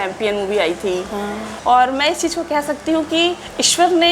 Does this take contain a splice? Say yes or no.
yes